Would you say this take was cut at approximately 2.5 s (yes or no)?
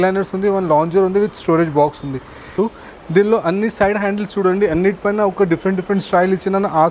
yes